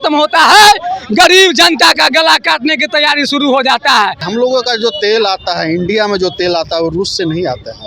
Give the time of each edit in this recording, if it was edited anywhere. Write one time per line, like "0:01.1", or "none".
0:04.2